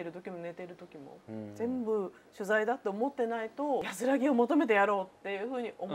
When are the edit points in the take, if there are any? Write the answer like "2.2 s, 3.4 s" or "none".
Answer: 3.9 s